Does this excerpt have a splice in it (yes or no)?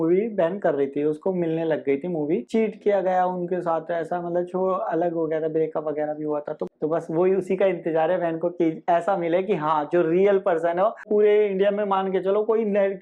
yes